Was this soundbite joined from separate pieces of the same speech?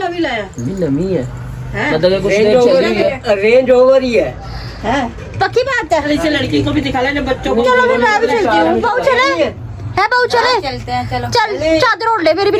no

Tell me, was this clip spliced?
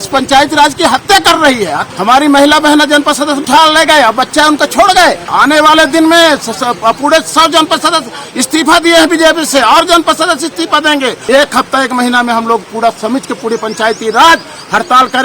yes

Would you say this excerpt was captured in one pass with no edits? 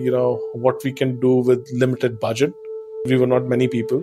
no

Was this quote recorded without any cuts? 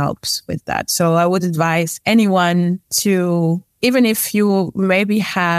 no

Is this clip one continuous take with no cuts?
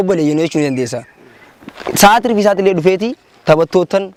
yes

